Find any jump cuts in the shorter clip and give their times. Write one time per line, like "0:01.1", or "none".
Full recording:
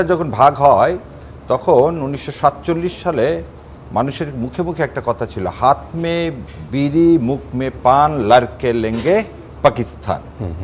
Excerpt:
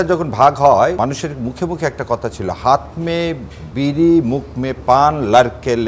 0:01.0